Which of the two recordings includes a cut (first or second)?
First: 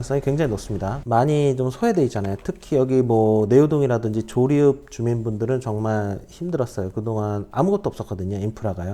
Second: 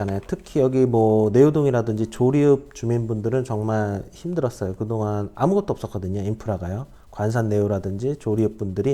first